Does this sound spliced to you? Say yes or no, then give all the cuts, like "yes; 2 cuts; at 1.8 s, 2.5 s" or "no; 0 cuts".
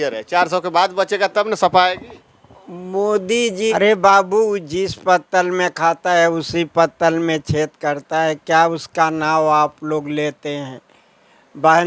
yes; 1 cut; at 3.6 s